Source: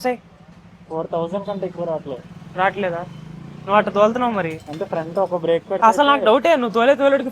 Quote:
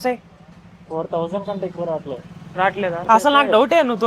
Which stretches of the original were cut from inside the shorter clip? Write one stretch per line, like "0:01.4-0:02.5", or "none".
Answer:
0:03.1-0:05.8